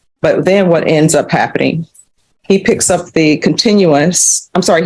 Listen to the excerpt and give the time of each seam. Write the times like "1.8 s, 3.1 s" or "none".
none